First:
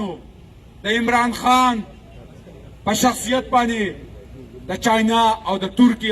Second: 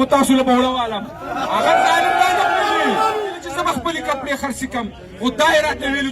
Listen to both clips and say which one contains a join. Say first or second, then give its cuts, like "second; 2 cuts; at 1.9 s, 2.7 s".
second; 1 cut; at 3.3 s